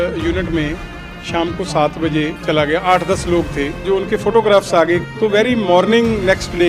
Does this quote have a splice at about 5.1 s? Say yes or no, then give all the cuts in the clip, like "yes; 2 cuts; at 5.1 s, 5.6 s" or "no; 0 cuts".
yes; 3 cuts; at 2.4 s, 3.8 s, 5.1 s